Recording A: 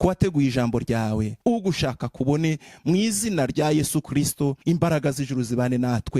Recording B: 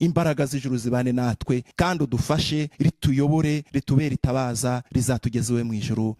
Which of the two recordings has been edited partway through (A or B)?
A